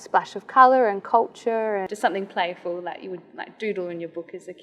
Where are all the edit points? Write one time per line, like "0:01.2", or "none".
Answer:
0:01.9